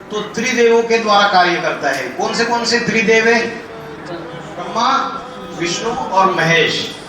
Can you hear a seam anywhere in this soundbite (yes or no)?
yes